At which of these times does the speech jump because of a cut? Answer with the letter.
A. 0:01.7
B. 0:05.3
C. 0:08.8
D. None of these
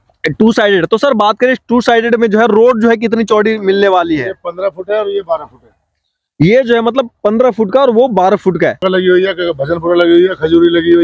C